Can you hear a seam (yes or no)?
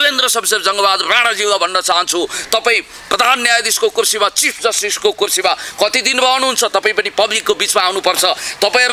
no